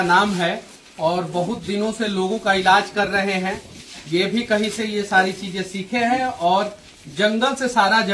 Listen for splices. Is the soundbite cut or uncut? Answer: uncut